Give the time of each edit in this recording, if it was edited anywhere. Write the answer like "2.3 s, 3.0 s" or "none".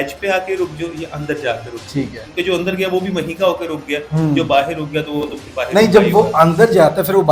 none